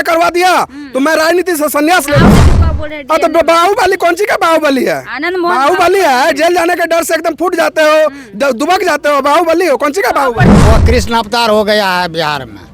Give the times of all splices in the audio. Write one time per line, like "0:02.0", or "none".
0:02.4
0:10.5

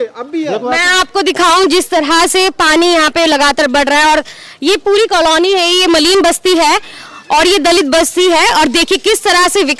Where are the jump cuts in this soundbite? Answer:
none

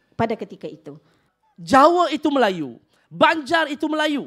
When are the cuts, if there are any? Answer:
0:01.3

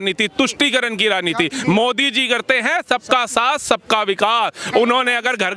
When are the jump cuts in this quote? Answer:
none

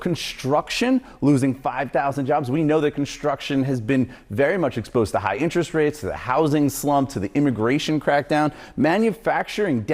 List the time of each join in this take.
0:08.6

